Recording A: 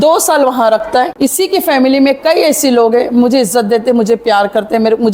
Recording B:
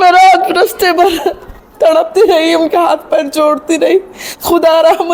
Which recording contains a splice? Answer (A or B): A